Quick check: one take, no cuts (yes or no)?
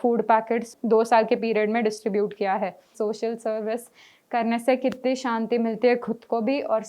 no